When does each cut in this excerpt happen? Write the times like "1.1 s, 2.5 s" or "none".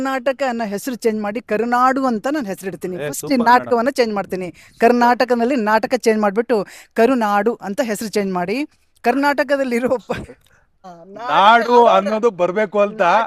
10.8 s